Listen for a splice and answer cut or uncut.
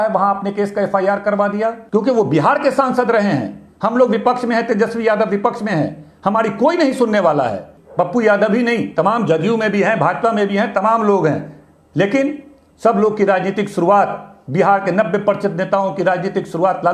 cut